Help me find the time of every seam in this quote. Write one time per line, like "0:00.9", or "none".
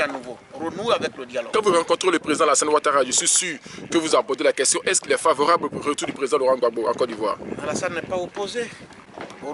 0:01.5